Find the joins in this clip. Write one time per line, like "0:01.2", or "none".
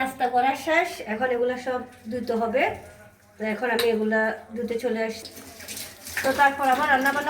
0:05.2

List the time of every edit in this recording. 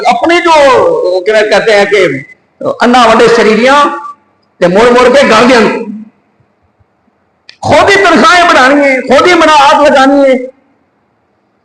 none

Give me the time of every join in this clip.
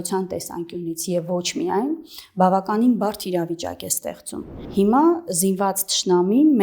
0:04.6

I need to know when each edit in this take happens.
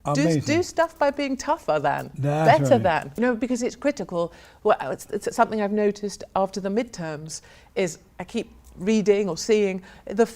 0:03.2

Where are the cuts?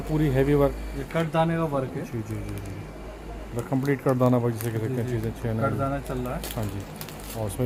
none

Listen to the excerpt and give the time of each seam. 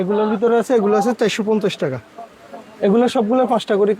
none

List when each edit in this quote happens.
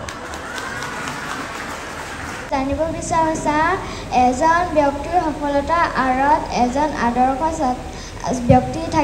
0:02.5

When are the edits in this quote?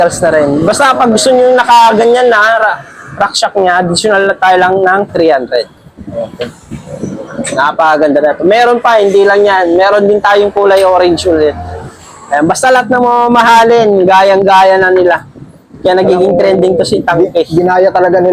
none

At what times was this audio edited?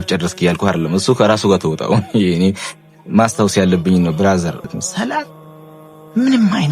0:04.7

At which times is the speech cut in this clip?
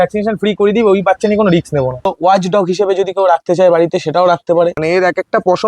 0:02.1
0:04.8

